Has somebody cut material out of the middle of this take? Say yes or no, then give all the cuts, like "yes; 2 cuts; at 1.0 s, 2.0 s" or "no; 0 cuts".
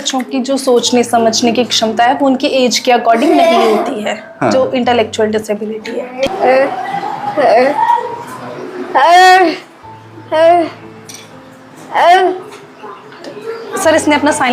yes; 1 cut; at 6.3 s